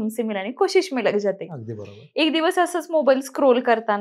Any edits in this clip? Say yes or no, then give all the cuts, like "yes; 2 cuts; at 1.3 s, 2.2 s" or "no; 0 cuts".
no; 0 cuts